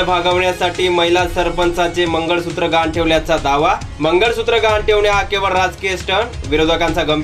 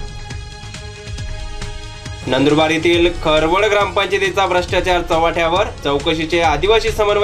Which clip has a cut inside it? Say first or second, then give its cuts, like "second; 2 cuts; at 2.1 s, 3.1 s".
second; 2 cuts; at 1.1 s, 2.2 s